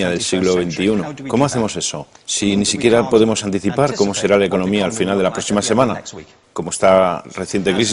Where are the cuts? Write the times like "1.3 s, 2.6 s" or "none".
none